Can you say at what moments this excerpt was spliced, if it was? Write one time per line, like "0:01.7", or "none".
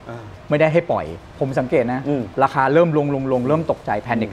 0:01.2
0:02.3